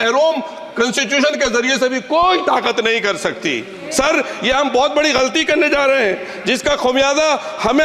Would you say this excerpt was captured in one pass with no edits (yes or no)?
yes